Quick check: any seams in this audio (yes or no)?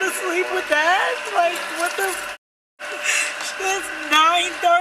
no